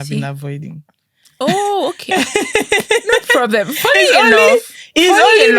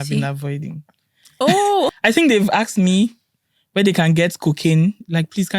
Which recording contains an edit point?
second; 1 cut; at 2.0 s

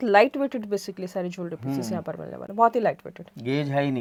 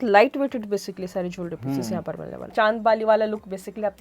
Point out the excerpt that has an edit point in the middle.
second; 1 cut; at 2.3 s

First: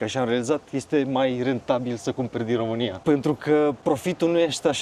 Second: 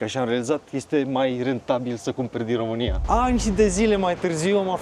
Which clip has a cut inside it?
second; 1 cut; at 3.0 s

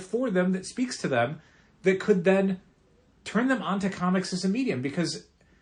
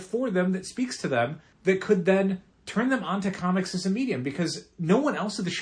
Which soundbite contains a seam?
second; 3 cuts; at 1.5 s, 2.5 s, 4.7 s

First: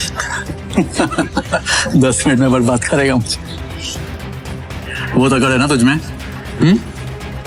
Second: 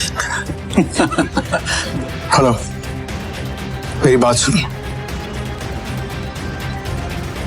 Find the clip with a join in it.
second; 2 cuts; at 1.8 s, 5.6 s

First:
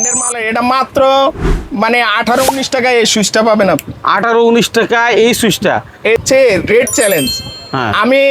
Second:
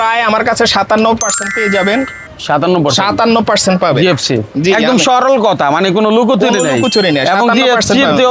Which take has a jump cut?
first; 1 cut; at 6.2 s

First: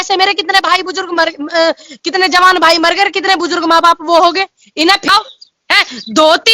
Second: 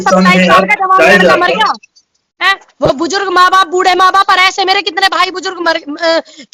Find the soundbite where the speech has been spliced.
first; 1 cut; at 5.1 s

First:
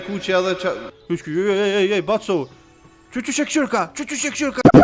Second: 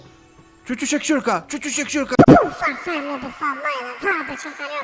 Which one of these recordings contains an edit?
first; 1 cut; at 0.9 s

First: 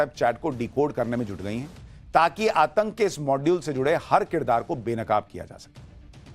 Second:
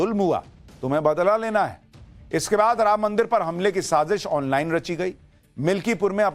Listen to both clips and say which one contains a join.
first; 1 cut; at 4.6 s

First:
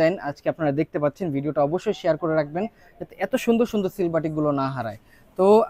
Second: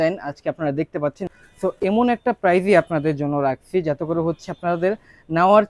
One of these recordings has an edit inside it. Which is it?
second; 1 cut; at 1.3 s

